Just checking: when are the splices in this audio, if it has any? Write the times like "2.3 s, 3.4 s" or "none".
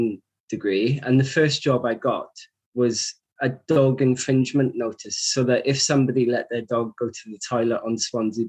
none